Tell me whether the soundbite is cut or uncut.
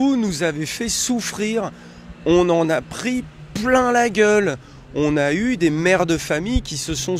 uncut